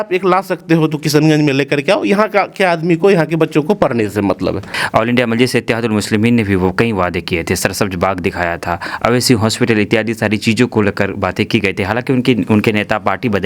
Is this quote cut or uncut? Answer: cut